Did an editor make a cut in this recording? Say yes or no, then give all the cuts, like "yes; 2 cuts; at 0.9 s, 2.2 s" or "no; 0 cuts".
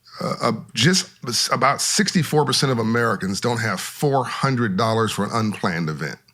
no; 0 cuts